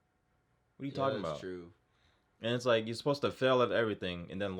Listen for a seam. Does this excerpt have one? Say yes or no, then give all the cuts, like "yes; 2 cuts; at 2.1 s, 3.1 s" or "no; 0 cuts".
no; 0 cuts